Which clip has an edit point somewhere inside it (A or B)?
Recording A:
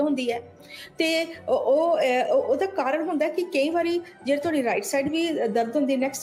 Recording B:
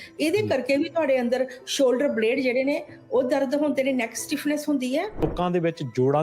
B